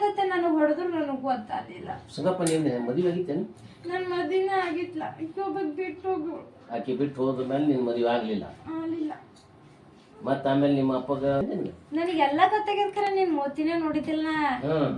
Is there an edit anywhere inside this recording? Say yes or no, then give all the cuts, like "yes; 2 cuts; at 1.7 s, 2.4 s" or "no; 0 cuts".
yes; 1 cut; at 11.4 s